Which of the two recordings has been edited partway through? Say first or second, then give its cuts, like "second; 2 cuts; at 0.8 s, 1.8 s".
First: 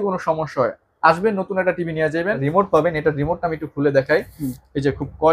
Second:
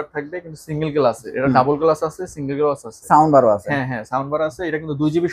first; 1 cut; at 2.4 s